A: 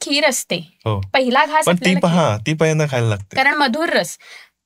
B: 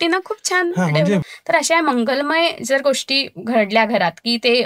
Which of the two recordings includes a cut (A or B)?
B